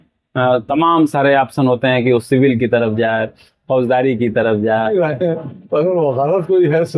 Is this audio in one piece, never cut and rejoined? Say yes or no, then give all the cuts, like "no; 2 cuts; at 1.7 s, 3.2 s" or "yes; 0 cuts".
no; 1 cut; at 4.9 s